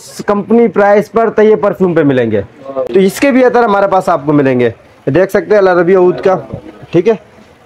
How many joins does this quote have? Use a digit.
1